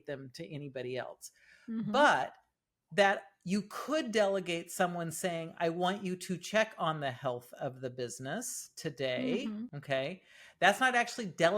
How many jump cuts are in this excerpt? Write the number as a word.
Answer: one